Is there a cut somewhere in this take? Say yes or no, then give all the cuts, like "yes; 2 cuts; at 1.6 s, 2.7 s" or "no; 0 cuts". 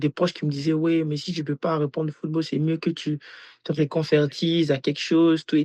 no; 0 cuts